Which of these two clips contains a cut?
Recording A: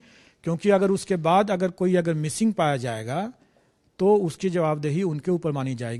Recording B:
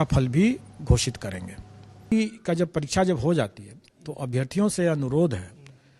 B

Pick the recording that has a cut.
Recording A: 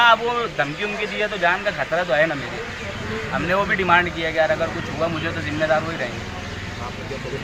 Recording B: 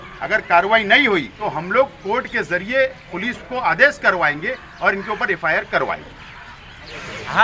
B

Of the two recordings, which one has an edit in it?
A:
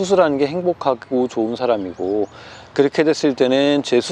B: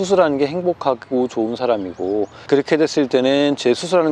B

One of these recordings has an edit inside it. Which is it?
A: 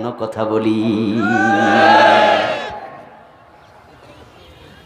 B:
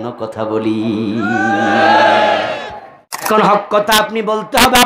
B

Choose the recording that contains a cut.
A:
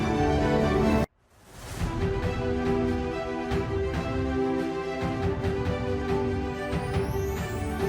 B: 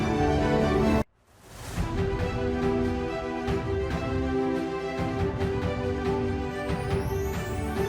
B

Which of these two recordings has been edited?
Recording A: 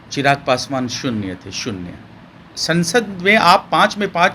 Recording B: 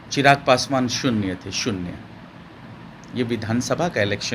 A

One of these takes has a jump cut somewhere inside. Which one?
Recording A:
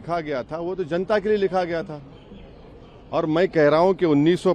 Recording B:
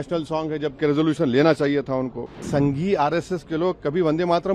B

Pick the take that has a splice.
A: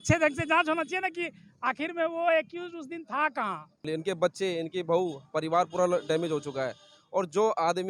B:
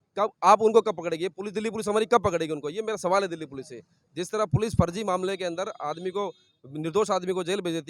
A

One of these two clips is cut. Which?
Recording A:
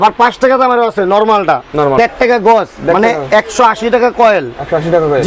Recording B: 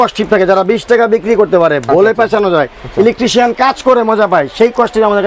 A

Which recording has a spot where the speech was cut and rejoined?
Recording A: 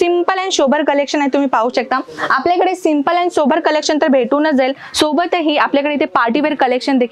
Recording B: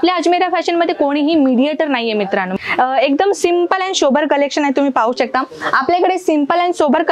B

